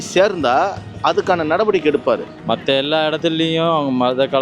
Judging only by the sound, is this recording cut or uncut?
cut